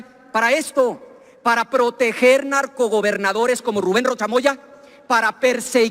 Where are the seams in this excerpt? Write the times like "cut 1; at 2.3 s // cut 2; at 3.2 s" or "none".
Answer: none